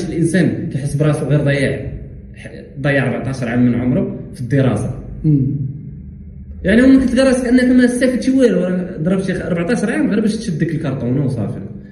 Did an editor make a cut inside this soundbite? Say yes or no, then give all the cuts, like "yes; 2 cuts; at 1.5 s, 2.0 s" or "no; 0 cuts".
no; 0 cuts